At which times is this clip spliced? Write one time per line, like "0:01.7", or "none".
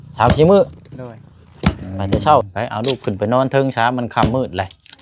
0:02.4